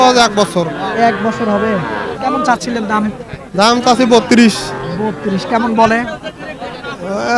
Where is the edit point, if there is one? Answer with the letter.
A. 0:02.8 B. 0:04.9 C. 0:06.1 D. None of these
D